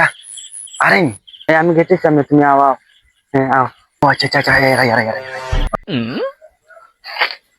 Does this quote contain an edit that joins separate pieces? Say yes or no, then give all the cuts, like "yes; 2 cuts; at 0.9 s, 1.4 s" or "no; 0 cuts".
yes; 1 cut; at 5.7 s